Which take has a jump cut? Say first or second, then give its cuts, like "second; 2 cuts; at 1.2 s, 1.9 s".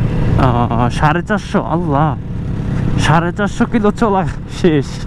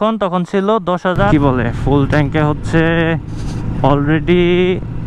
second; 1 cut; at 1.3 s